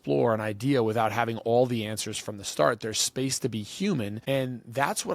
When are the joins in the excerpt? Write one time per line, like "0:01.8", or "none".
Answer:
0:04.2